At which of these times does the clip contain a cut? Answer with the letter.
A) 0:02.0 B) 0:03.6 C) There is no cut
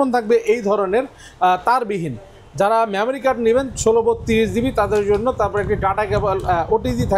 C